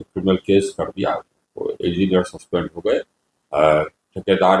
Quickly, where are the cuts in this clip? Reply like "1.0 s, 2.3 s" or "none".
none